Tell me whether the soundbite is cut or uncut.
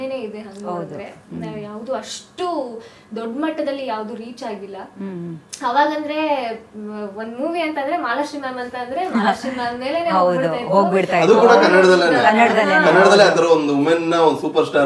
uncut